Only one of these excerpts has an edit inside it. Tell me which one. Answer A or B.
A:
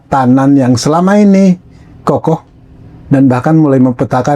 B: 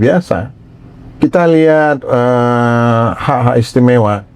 A